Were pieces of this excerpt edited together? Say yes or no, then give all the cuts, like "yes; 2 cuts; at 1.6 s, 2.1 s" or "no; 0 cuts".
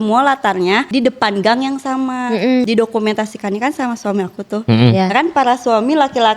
yes; 2 cuts; at 0.9 s, 2.6 s